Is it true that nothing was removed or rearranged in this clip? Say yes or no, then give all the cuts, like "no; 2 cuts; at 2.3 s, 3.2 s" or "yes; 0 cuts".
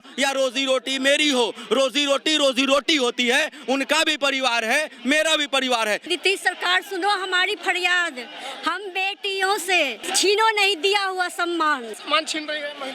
no; 3 cuts; at 6.0 s, 10.1 s, 12.0 s